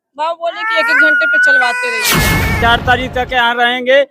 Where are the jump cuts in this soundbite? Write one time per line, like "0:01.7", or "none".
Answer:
0:02.6